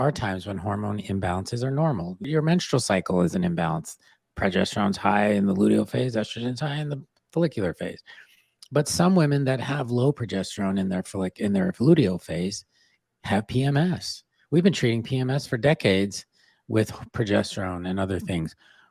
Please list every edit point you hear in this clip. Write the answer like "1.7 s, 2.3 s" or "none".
2.2 s